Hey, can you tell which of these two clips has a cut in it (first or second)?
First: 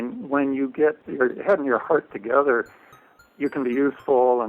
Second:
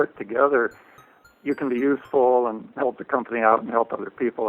first